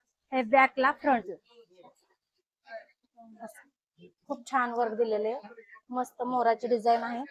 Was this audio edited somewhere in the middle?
no; 0 cuts

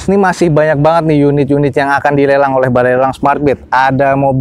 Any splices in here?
no; 0 cuts

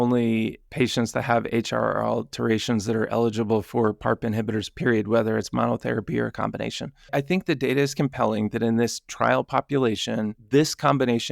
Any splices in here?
yes; 2 cuts; at 7.1 s, 10.4 s

